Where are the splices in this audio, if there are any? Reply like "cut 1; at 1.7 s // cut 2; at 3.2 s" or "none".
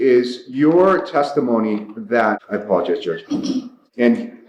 none

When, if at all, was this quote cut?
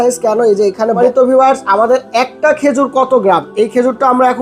cut 1; at 1.0 s

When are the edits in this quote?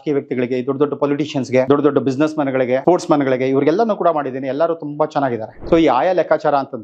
cut 1; at 1.7 s // cut 2; at 2.8 s // cut 3; at 5.5 s

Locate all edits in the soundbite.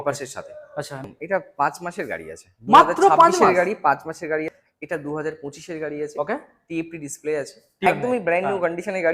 cut 1; at 1.0 s // cut 2; at 4.4 s // cut 3; at 7.9 s

